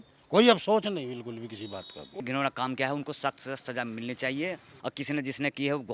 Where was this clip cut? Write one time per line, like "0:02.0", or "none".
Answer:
0:02.2
0:04.7